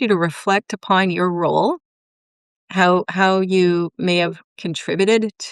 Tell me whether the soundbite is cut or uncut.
uncut